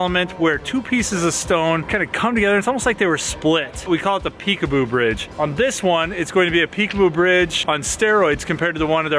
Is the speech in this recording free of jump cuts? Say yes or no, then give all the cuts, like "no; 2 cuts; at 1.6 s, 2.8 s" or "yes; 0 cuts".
yes; 0 cuts